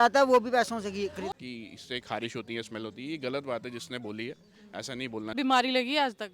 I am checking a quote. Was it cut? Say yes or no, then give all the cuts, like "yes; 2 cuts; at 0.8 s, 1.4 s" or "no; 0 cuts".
yes; 2 cuts; at 1.3 s, 5.3 s